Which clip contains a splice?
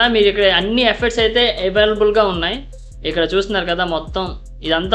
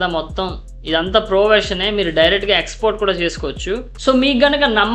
second; 1 cut; at 3.9 s

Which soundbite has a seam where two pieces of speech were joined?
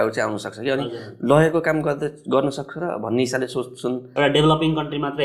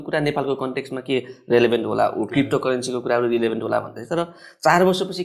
first; 1 cut; at 4.0 s

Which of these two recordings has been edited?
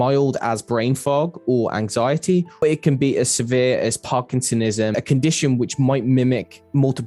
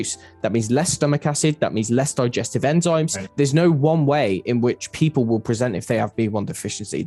first; 2 cuts; at 2.6 s, 4.9 s

